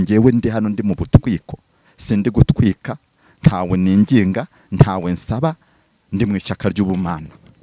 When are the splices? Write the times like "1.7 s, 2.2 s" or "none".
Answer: none

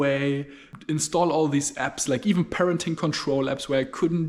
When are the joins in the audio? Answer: none

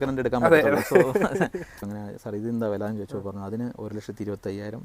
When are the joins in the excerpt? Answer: 1.8 s

